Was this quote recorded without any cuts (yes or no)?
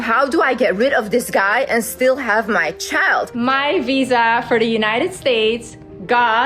no